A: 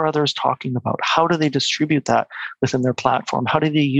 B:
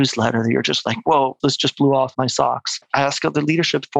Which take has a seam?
B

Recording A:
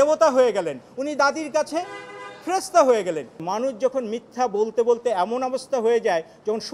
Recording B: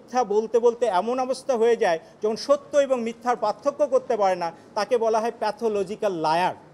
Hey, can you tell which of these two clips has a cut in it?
A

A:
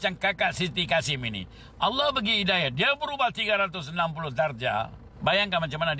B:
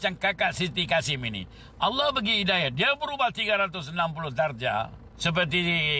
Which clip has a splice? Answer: A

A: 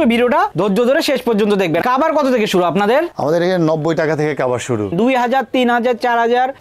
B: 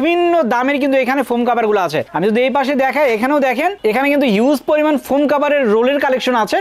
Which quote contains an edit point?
A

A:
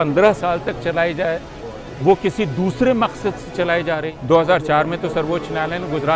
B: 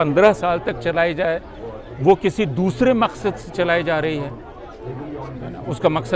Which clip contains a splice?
A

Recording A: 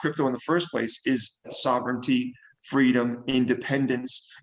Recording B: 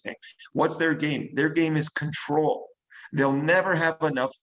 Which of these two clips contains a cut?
A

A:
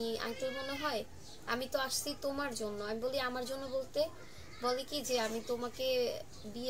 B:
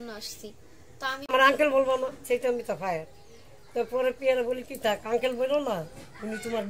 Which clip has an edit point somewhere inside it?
B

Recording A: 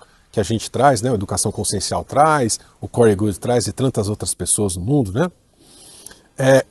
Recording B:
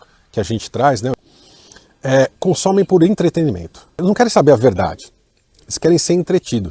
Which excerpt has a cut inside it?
B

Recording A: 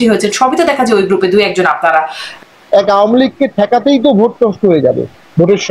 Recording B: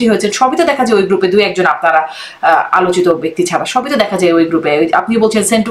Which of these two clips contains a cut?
A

